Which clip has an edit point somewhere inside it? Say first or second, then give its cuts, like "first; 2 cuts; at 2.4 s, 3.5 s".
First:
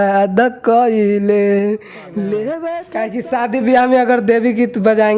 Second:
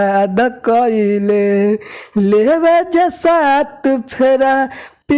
first; 1 cut; at 2.8 s